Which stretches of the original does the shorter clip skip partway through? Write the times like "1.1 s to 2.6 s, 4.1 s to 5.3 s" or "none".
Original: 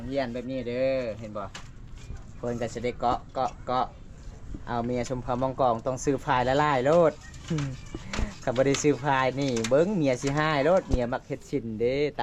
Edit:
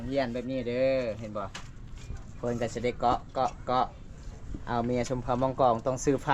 none